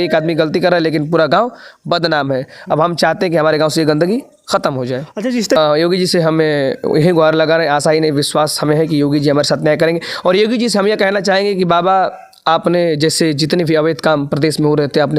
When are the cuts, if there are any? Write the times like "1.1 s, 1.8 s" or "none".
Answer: 5.6 s